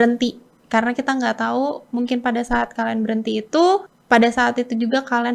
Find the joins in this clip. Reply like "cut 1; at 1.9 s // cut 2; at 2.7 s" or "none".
cut 1; at 3.9 s